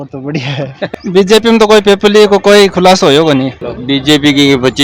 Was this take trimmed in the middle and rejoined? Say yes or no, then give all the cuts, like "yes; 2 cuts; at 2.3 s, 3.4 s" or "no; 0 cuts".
yes; 2 cuts; at 0.9 s, 3.6 s